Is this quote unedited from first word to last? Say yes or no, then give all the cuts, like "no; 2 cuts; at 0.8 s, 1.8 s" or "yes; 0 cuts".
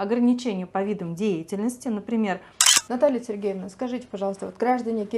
no; 1 cut; at 2.6 s